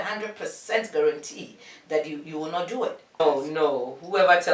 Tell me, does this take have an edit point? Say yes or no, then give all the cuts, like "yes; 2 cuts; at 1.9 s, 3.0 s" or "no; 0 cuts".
yes; 1 cut; at 3.2 s